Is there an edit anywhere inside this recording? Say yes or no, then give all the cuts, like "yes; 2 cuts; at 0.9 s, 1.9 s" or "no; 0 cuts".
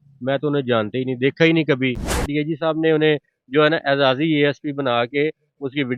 yes; 1 cut; at 2.2 s